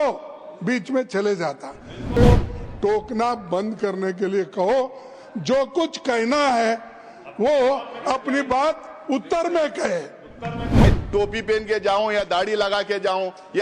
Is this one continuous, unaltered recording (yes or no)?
no